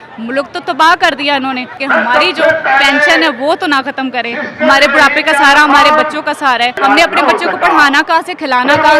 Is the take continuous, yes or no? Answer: no